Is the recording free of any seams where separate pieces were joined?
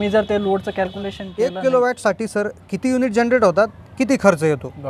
no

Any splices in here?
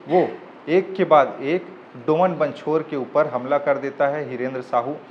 no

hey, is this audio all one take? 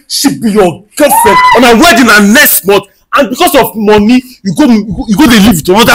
yes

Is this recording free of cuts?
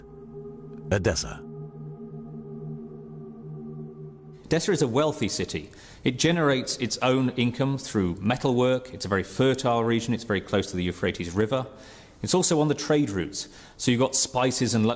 no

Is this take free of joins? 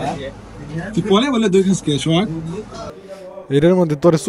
no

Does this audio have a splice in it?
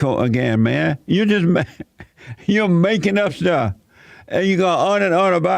no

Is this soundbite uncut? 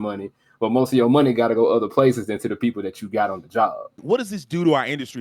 no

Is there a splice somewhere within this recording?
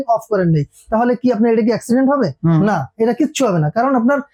no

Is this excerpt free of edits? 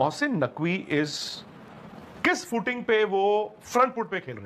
yes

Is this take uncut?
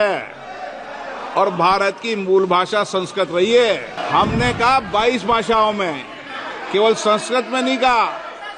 no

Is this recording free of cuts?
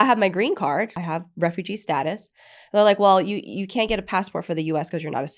no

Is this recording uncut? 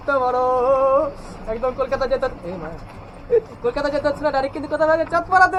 yes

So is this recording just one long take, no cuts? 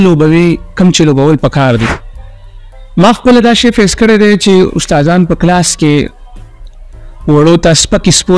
no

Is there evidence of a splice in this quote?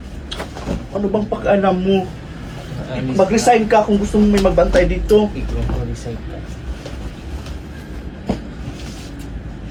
no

